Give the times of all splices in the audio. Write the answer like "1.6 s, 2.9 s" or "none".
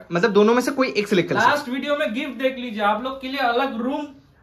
none

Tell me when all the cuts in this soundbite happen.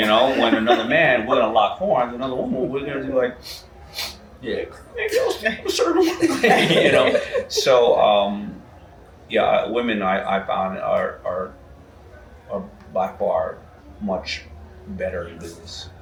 none

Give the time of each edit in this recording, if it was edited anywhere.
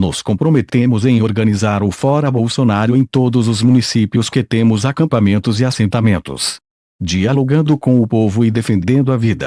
4.2 s

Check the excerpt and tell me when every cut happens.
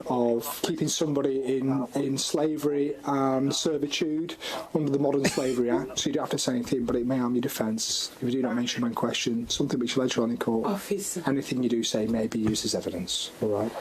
none

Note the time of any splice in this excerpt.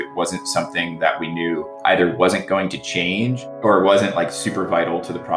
1.7 s, 3.4 s

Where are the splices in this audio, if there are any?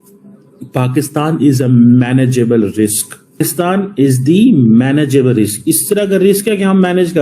3.4 s

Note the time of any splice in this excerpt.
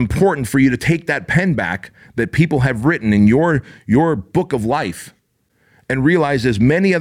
none

